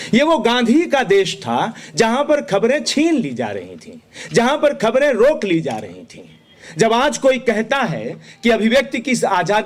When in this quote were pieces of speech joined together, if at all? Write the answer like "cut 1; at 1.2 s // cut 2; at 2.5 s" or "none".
none